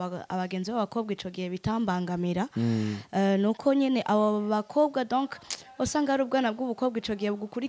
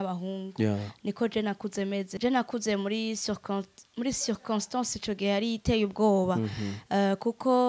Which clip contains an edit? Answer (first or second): second